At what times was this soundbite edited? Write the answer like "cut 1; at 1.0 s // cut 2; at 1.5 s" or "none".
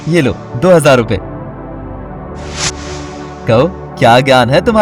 cut 1; at 1.2 s // cut 2; at 3.3 s